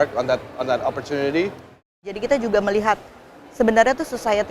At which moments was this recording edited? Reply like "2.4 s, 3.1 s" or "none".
2.1 s